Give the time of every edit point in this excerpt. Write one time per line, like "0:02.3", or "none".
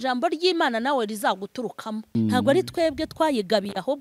0:02.1

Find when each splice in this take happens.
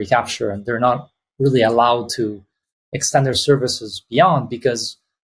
none

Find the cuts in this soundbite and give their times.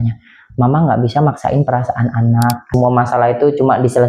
0:02.6

